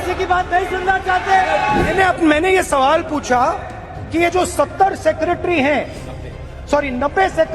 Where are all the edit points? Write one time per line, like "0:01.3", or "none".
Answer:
0:01.9